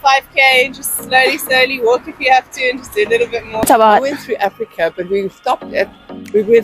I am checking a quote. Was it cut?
yes; 1 cut; at 3.7 s

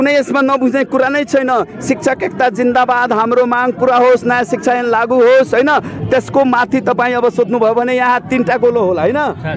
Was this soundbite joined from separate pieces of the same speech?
no; 0 cuts

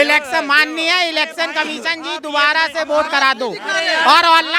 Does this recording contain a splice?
no; 0 cuts

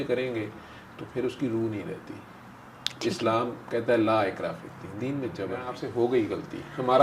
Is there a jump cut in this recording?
yes; 1 cut; at 5.8 s

